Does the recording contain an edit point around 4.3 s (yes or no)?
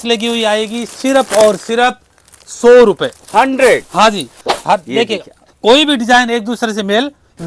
yes